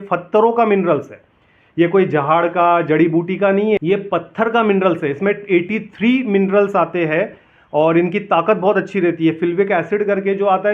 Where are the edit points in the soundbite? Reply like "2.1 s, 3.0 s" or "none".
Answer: 3.8 s